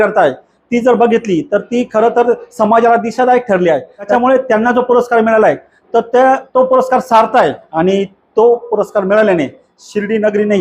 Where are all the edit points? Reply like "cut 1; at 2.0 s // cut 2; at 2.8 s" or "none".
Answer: cut 1; at 4.1 s // cut 2; at 7.6 s